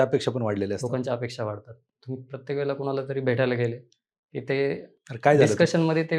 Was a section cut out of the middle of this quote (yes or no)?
no